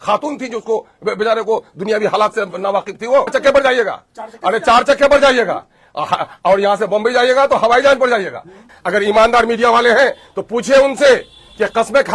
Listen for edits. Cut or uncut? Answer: cut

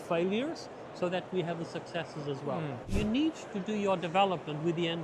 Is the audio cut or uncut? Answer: cut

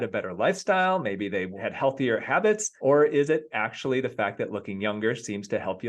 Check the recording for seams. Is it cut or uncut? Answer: cut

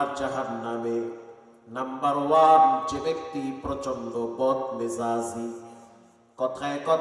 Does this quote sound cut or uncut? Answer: uncut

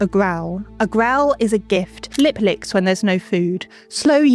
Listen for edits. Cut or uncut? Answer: cut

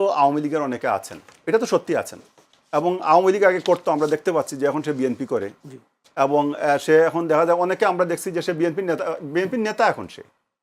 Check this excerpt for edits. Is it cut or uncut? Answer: uncut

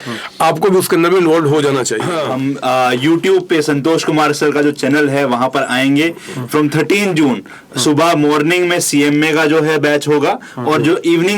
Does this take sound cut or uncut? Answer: cut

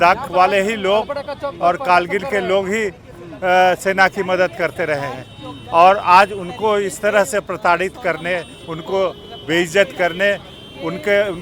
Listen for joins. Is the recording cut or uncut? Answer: uncut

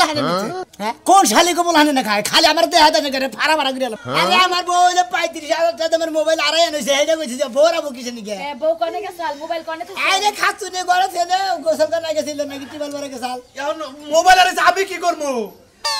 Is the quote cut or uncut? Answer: cut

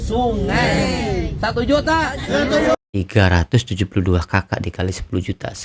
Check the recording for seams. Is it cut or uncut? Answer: cut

